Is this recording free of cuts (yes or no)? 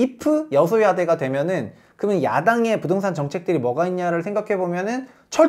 yes